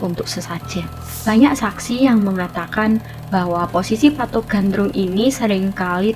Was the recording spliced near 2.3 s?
no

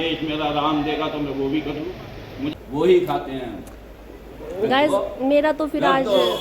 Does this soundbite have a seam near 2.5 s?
yes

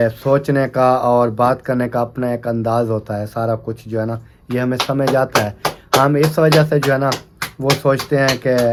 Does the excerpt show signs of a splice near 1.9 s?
no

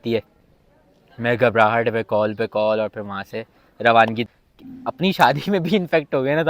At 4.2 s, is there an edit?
yes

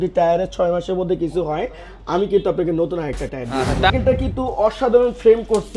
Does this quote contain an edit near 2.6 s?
no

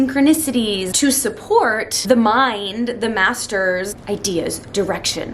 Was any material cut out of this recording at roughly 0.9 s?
yes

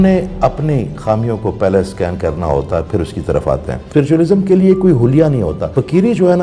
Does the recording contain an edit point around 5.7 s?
yes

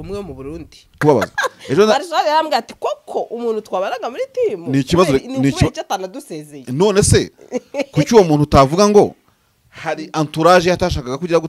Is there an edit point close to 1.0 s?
yes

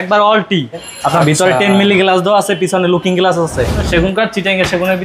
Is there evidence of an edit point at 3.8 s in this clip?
yes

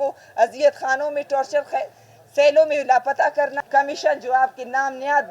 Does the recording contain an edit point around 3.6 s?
yes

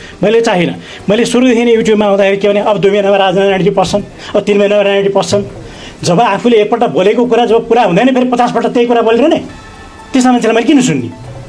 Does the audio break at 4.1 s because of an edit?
no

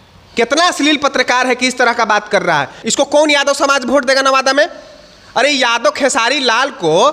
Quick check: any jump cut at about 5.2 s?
no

